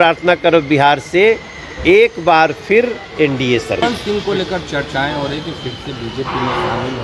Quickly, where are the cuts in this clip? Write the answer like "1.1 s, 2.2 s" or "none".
3.8 s

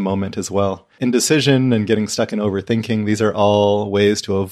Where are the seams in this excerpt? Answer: 0.9 s

